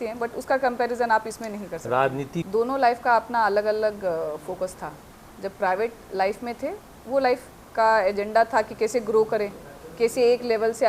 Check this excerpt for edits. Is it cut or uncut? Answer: cut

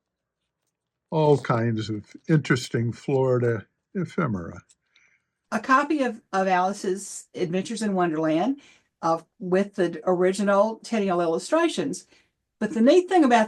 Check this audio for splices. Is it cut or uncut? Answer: cut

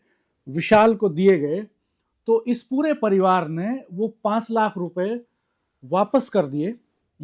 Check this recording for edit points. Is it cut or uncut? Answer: uncut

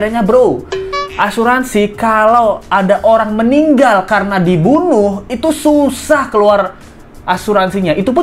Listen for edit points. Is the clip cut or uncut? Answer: uncut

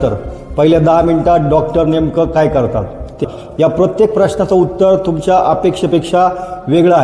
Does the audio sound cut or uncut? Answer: cut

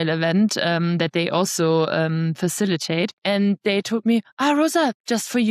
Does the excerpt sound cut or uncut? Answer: cut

